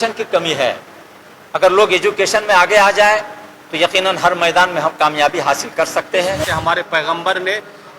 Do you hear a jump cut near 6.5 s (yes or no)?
yes